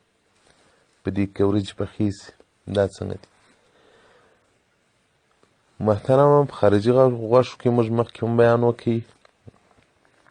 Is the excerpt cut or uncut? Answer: uncut